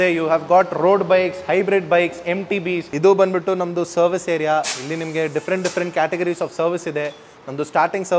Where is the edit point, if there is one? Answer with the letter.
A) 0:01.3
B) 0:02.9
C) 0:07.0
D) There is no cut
B